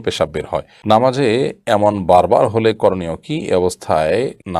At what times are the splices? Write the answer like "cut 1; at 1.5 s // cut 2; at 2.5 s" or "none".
none